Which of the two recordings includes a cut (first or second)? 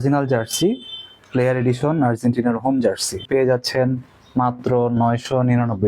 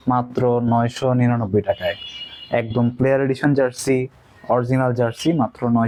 first